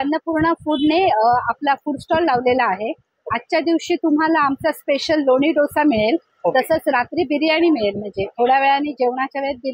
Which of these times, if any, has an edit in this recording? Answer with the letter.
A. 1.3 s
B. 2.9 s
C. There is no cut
C